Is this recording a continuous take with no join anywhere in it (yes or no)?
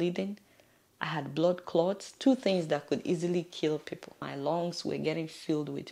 no